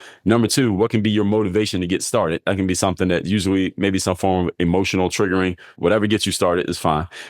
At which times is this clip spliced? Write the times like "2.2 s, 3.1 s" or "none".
5.7 s